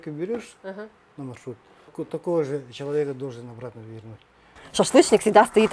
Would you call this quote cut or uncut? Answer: cut